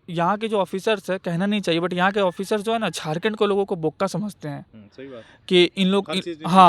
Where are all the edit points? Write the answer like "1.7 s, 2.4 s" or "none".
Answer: none